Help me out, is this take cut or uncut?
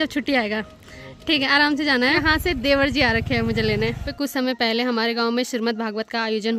cut